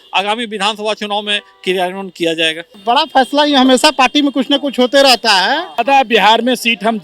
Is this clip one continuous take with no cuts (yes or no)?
no